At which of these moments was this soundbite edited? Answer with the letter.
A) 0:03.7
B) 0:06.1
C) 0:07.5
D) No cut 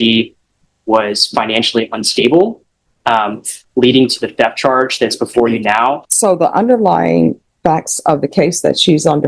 B